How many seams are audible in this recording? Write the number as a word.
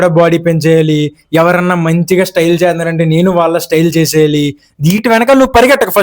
one